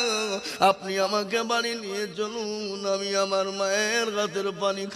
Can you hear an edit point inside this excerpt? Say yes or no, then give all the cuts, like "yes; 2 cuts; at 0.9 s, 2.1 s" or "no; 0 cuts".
no; 0 cuts